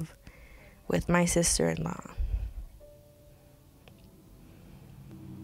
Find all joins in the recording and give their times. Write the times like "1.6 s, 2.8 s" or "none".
3.8 s